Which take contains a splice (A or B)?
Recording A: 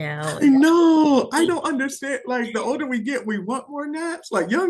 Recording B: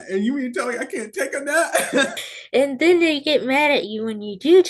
B